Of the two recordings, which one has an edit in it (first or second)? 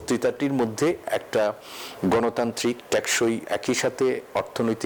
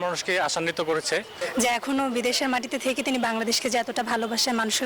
second